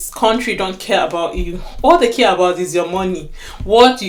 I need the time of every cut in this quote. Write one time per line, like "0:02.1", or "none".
none